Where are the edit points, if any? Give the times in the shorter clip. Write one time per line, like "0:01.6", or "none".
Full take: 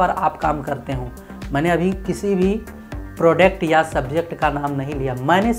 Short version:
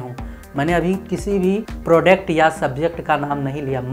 0:01.7